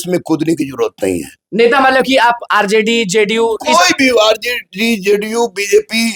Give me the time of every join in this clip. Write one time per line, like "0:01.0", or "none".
none

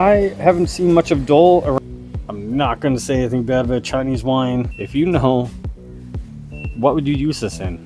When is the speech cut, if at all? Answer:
0:01.8
0:04.8

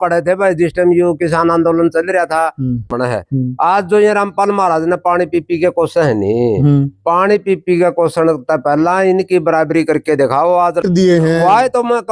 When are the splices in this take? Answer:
0:02.9
0:10.8

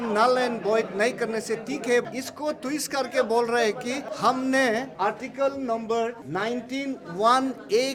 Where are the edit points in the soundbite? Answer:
0:02.0
0:04.1
0:04.9
0:06.2

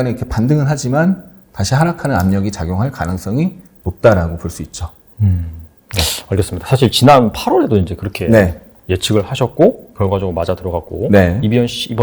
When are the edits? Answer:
none

